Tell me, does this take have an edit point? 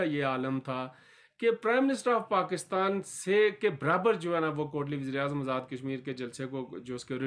no; 0 cuts

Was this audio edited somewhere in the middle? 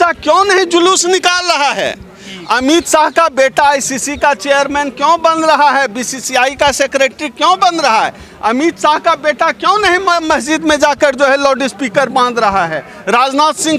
no; 0 cuts

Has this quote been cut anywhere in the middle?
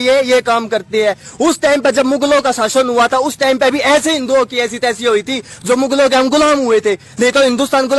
no; 0 cuts

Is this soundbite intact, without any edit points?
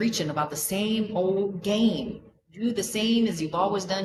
yes; 0 cuts

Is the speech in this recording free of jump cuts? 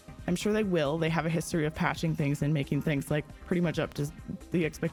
yes; 0 cuts

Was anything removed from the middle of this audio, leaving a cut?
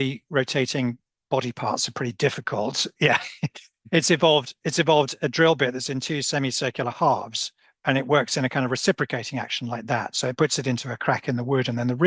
no; 0 cuts

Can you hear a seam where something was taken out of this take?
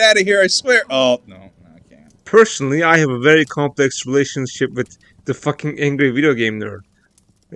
yes; 1 cut; at 2.1 s

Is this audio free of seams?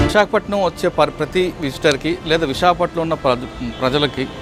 yes; 0 cuts

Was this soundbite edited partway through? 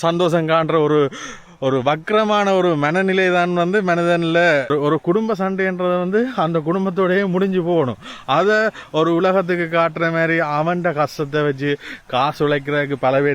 yes; 1 cut; at 4.7 s

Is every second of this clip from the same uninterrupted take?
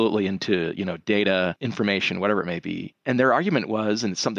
no; 2 cuts; at 1.6 s, 2.9 s

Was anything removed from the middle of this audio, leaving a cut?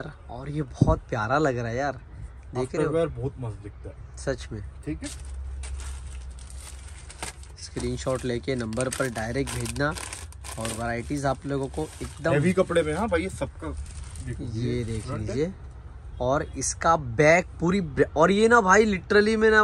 no; 0 cuts

